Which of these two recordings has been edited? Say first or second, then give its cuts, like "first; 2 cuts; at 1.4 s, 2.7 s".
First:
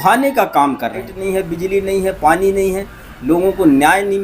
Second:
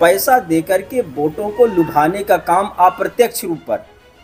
first; 1 cut; at 1.1 s